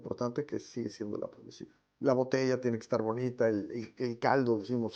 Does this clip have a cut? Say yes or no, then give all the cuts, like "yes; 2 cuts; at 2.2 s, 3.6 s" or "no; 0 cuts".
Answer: yes; 1 cut; at 1.9 s